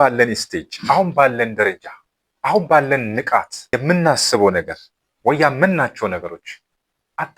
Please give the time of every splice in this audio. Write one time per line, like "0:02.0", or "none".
0:03.6